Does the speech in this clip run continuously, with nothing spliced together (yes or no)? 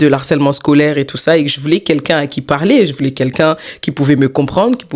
yes